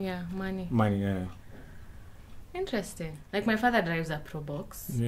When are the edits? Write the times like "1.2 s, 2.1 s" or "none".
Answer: 3.2 s